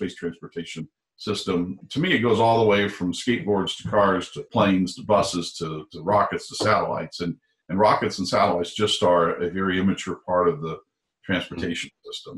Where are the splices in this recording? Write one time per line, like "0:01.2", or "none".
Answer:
0:01.8
0:04.4